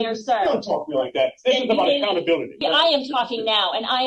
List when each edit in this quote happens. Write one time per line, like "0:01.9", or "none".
0:02.5